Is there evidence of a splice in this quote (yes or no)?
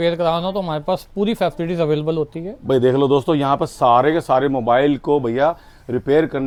no